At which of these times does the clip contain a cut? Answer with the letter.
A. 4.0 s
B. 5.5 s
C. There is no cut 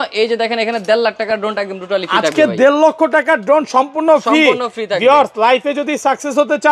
C